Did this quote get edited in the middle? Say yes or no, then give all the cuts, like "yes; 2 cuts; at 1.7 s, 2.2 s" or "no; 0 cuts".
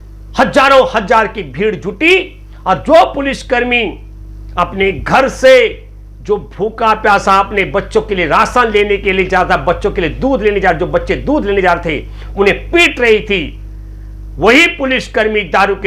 no; 0 cuts